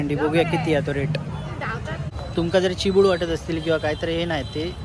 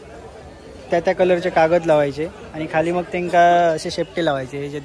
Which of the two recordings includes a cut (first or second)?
first